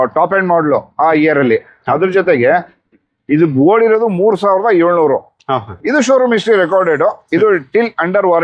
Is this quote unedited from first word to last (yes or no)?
yes